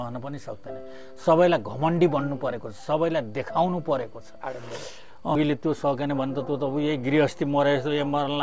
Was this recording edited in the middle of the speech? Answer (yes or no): yes